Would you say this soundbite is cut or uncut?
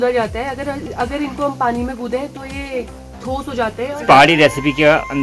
cut